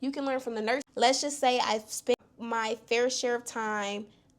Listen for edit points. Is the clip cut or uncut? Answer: cut